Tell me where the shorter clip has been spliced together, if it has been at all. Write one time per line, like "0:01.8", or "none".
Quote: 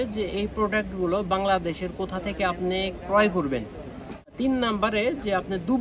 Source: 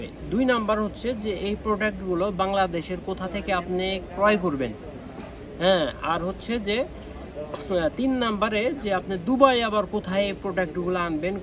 0:04.4